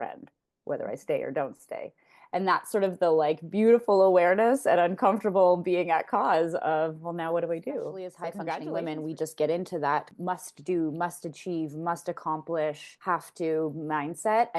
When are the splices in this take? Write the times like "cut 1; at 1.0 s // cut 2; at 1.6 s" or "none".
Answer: cut 1; at 8.5 s